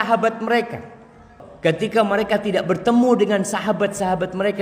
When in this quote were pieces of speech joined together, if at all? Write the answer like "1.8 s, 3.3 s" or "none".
1.4 s